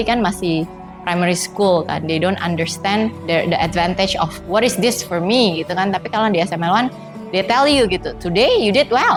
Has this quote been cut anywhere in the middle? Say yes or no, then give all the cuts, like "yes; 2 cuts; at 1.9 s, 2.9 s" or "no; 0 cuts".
no; 0 cuts